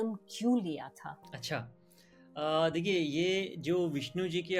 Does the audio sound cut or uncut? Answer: uncut